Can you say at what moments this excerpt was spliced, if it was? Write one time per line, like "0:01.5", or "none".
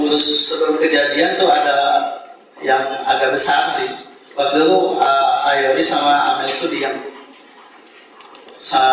none